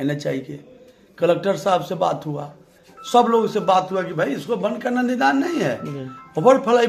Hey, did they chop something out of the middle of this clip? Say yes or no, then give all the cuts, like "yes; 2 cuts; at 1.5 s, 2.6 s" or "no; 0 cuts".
no; 0 cuts